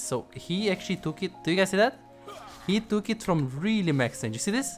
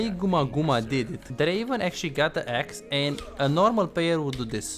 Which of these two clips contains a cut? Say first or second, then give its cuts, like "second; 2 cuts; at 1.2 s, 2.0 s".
second; 1 cut; at 1.2 s